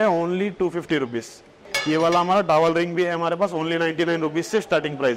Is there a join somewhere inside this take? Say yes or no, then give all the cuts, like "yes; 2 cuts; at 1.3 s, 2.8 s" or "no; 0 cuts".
no; 0 cuts